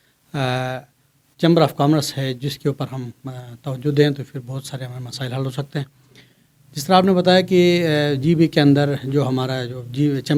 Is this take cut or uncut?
uncut